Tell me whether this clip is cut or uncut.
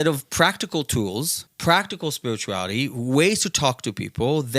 cut